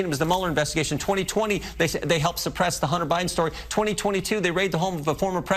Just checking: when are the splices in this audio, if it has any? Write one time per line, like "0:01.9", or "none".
none